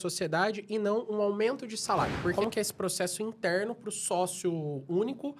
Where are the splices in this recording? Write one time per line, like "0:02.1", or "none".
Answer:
0:02.3